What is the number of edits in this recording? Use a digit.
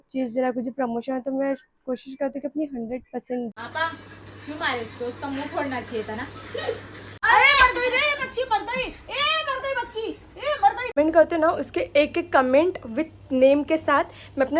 3